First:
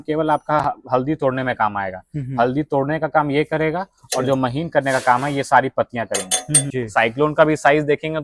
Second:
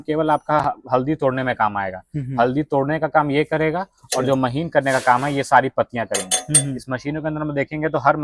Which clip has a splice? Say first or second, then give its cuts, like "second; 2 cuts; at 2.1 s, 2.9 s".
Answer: first; 1 cut; at 6.6 s